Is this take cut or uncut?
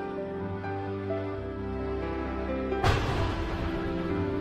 uncut